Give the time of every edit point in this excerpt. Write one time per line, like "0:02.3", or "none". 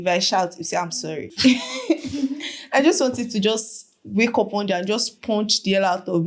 0:01.3

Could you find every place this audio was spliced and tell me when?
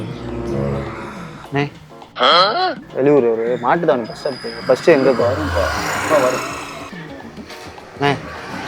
0:01.4
0:02.8

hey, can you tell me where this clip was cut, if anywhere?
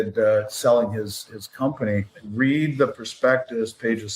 0:02.2

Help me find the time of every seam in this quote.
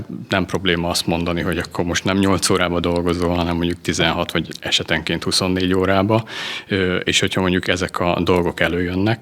none

